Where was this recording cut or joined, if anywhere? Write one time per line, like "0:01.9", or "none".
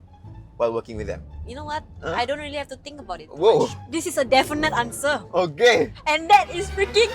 0:06.0